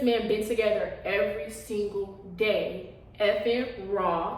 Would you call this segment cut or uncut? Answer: uncut